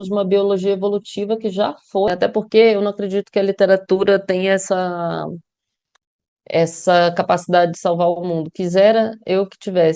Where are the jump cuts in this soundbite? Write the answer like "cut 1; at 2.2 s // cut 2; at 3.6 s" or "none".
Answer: cut 1; at 2.1 s